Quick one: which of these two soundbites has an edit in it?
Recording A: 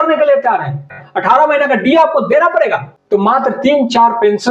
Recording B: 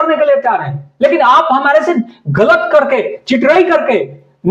A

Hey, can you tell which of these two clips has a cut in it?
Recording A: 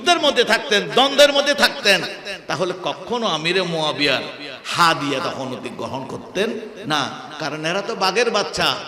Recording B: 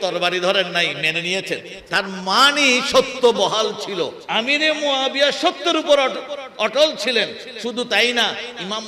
B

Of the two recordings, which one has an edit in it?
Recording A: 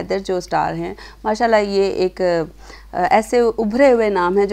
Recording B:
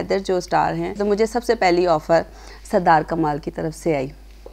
B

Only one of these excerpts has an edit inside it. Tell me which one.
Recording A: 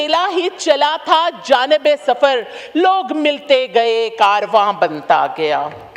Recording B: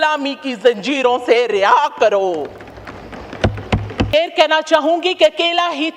B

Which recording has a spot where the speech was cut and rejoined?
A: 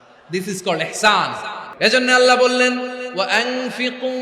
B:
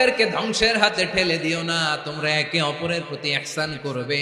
A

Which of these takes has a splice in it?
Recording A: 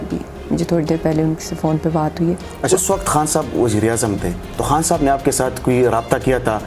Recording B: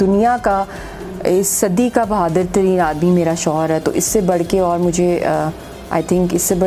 A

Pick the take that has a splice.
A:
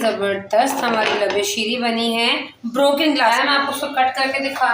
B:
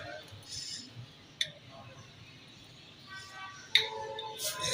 A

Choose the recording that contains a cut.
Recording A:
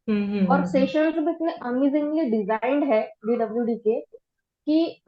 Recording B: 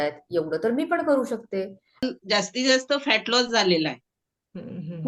B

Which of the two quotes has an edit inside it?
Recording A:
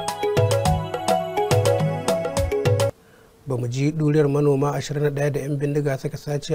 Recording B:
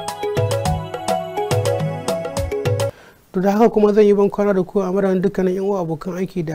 A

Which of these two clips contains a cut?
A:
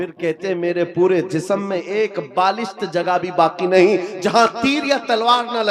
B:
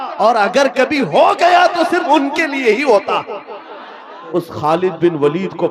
B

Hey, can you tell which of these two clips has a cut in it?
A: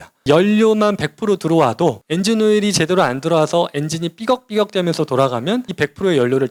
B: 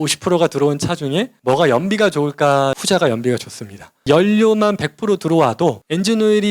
B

